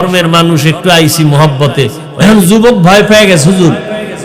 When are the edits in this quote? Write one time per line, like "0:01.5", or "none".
0:02.0